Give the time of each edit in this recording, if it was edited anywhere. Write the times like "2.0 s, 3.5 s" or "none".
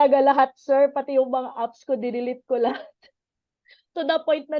none